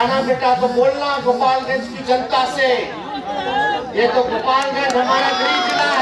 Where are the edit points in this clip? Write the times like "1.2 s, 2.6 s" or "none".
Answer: none